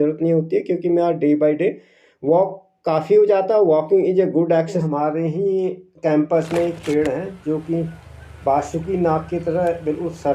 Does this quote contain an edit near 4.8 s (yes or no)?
yes